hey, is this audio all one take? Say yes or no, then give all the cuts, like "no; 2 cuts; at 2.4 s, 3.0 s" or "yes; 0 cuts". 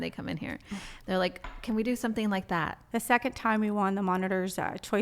no; 1 cut; at 2.8 s